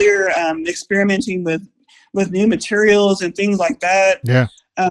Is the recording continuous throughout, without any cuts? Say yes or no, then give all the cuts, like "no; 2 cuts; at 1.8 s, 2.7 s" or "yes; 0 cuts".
yes; 0 cuts